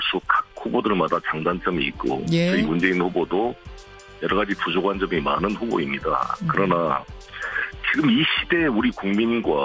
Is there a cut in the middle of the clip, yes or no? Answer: no